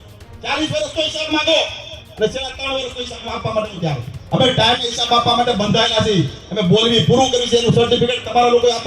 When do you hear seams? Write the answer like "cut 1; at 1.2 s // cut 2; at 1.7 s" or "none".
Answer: cut 1; at 4.1 s